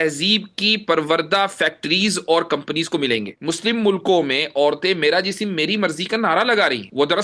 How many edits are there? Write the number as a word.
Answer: one